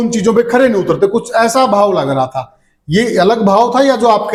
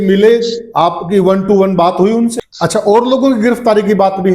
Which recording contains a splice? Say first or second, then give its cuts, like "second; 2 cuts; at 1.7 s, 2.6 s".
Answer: second; 1 cut; at 2.3 s